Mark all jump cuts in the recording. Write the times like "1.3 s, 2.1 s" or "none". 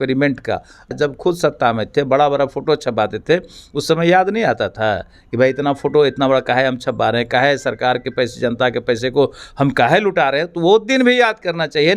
0.9 s